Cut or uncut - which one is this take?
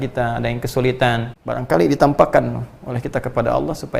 cut